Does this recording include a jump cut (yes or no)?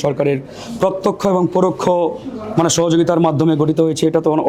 no